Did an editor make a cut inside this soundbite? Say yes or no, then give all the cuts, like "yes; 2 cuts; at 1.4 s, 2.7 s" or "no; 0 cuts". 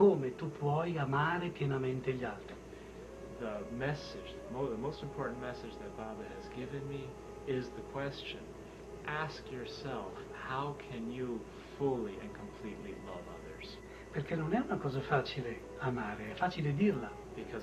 no; 0 cuts